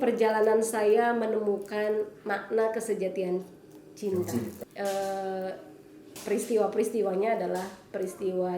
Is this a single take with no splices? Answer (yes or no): no